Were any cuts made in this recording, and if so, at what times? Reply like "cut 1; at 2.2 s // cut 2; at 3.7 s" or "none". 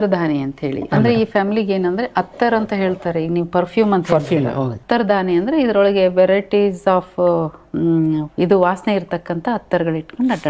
cut 1; at 4.8 s